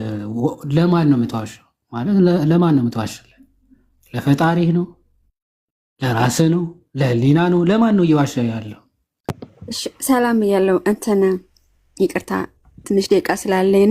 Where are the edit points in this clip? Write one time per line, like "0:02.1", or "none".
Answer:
0:09.3